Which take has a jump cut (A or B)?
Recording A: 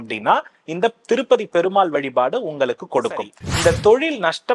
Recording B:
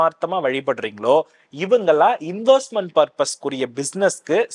A